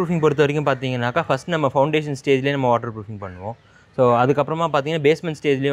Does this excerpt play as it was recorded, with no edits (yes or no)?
yes